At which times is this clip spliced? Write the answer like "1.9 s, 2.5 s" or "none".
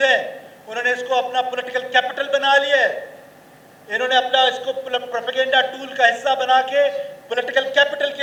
none